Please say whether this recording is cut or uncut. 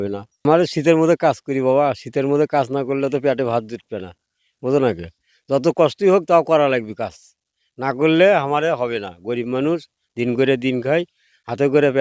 uncut